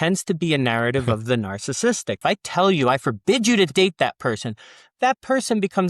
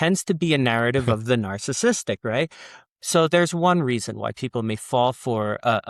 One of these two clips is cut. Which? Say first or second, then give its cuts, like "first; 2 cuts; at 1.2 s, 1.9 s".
first; 1 cut; at 2.2 s